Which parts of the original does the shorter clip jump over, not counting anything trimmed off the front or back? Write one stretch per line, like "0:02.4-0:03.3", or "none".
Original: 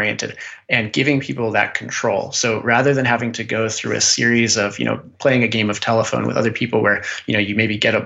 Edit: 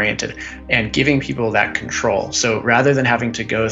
none